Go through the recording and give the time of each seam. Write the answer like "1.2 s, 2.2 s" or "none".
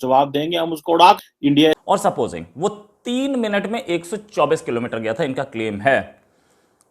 1.8 s

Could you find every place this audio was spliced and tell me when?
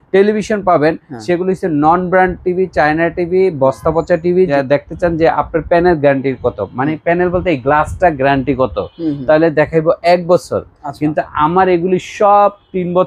4.5 s

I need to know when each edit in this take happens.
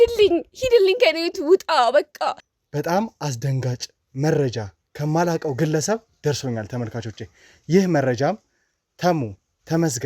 2.4 s

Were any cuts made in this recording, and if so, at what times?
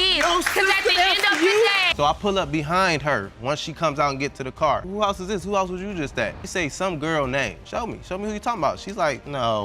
1.9 s, 4.9 s, 6.4 s

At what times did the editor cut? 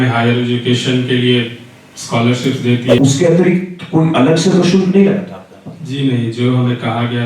3.0 s

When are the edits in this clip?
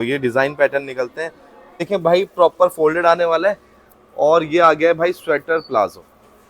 1.8 s

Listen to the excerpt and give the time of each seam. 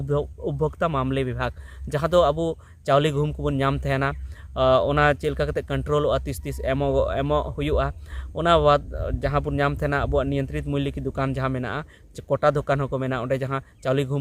none

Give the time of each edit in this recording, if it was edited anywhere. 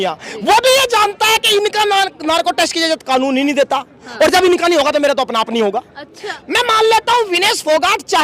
6.3 s

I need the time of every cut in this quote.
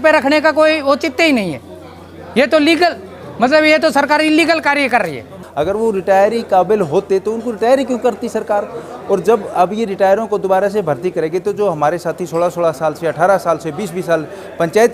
5.4 s

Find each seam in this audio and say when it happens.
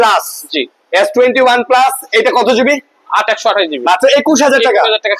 none

